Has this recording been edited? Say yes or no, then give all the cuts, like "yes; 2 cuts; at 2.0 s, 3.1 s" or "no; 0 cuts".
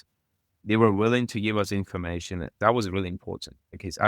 yes; 1 cut; at 2.5 s